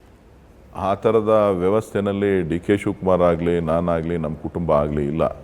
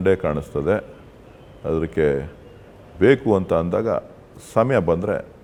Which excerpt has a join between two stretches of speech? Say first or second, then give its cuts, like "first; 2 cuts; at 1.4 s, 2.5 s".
first; 1 cut; at 1.2 s